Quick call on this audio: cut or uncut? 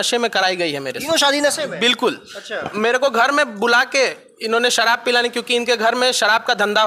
uncut